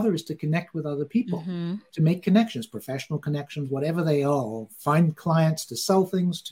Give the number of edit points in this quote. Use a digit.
0